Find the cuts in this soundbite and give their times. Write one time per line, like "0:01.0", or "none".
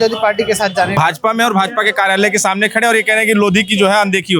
0:01.0